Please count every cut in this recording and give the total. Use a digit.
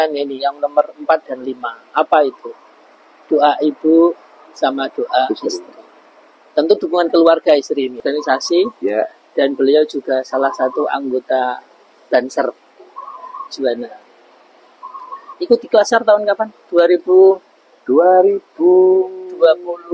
1